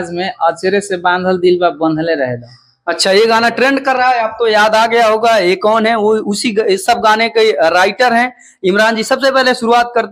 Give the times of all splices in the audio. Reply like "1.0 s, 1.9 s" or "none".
none